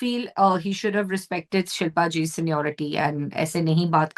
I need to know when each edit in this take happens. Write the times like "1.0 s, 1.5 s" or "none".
none